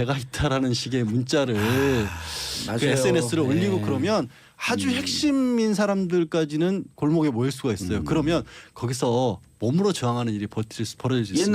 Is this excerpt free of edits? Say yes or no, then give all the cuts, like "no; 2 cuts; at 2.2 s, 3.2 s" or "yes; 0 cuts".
no; 1 cut; at 7.2 s